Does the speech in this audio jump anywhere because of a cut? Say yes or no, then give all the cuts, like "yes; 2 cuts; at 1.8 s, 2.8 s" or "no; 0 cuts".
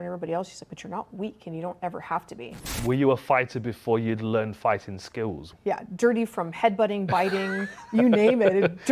yes; 2 cuts; at 2.7 s, 5.5 s